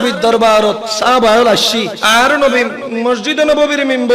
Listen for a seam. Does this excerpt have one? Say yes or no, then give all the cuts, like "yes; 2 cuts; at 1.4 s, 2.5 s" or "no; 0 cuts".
yes; 2 cuts; at 0.9 s, 2.0 s